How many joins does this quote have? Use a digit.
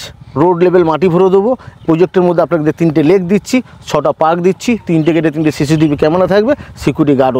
0